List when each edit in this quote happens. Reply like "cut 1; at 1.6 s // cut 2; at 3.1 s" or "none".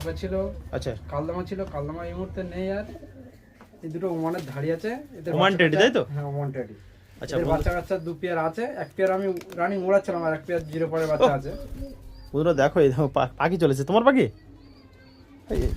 cut 1; at 3.0 s